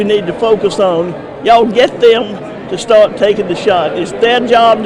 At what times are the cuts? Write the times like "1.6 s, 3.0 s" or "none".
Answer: none